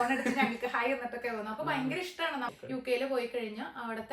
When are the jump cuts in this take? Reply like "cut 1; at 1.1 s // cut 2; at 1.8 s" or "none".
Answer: cut 1; at 2.5 s